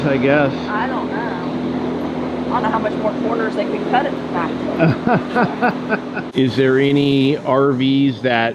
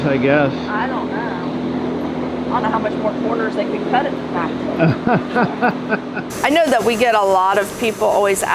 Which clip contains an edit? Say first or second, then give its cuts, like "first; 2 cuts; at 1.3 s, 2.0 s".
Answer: first; 1 cut; at 6.2 s